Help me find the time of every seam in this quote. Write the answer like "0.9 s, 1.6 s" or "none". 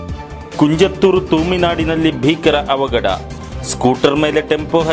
none